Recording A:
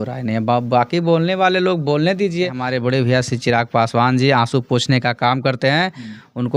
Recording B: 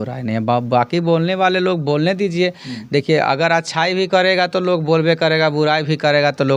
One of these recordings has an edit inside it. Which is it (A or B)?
A